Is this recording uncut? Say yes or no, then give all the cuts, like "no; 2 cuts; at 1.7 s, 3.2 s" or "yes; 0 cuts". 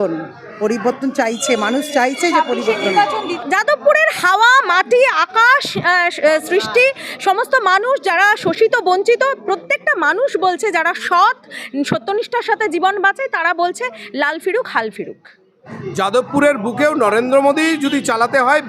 no; 2 cuts; at 3.3 s, 15.7 s